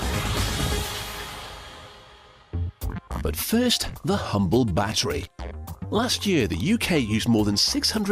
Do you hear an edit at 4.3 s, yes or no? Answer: no